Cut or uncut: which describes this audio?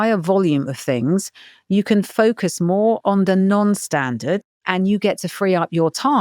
cut